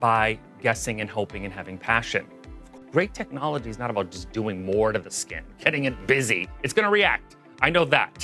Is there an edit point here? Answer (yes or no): yes